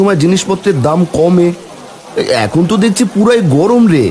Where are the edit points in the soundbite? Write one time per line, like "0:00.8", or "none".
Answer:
none